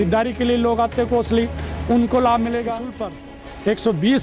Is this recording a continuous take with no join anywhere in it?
no; 1 cut; at 3.1 s

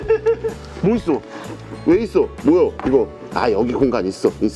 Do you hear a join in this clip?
no; 0 cuts

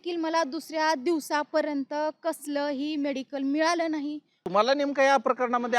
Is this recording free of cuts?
no; 1 cut; at 4.3 s

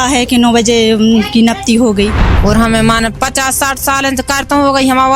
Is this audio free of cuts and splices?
no; 1 cut; at 2.3 s

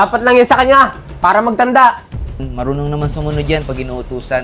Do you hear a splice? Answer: yes; 1 cut; at 2.5 s

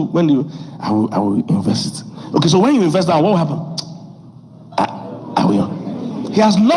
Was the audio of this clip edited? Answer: yes; 2 cuts; at 1.5 s, 5.6 s

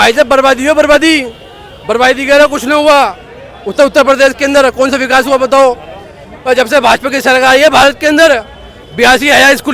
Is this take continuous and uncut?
yes; 0 cuts

